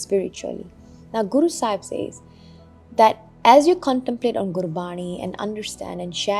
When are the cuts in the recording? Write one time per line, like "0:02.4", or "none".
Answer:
none